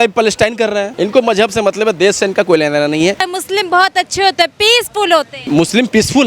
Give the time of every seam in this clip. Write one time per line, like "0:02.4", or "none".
0:00.9
0:03.2
0:05.5